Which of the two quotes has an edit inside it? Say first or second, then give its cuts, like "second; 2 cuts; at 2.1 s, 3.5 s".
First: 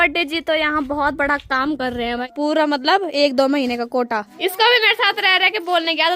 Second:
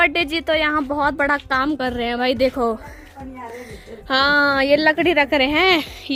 first; 2 cuts; at 2.2 s, 4.2 s